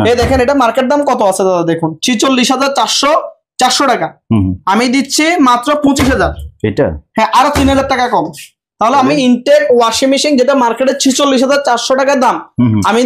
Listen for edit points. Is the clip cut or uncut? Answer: uncut